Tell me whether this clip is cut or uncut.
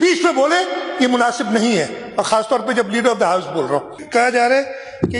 cut